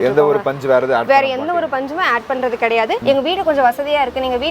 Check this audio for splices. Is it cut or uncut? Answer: cut